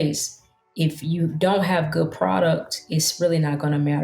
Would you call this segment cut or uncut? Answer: cut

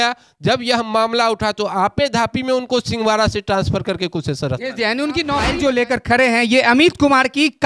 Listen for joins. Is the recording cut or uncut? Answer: cut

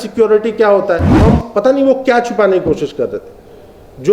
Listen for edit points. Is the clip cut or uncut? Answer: cut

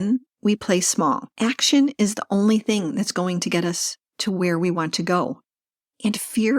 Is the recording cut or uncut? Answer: cut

